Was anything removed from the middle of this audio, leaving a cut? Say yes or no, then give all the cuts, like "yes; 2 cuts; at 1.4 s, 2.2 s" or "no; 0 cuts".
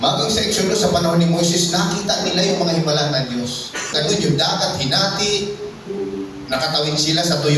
yes; 1 cut; at 3.9 s